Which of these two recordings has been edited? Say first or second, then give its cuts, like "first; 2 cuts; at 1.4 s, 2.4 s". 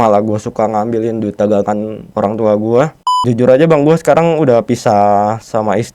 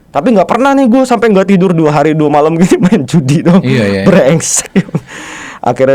first; 2 cuts; at 2.0 s, 3.2 s